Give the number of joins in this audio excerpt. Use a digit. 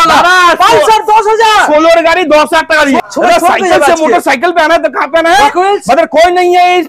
1